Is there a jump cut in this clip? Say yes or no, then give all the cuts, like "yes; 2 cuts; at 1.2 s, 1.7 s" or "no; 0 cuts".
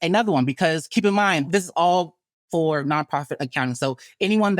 yes; 1 cut; at 1.5 s